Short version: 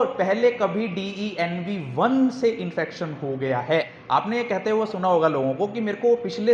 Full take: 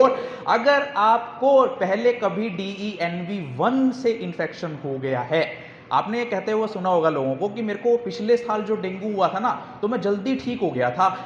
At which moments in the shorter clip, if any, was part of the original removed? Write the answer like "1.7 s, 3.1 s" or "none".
4.0 s